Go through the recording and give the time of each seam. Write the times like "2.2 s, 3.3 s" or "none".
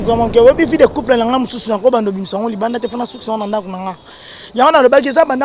none